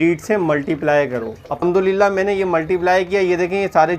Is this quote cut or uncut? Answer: cut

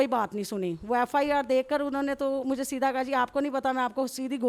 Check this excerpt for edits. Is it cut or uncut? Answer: uncut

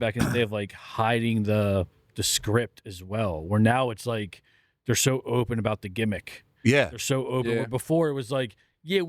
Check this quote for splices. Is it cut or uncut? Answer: uncut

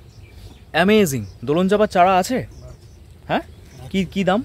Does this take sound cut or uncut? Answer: uncut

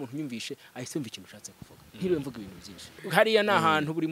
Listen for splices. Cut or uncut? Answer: cut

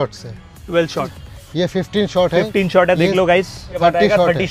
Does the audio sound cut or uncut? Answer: cut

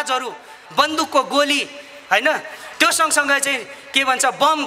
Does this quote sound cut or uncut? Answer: uncut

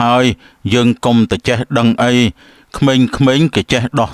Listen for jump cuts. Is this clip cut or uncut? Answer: uncut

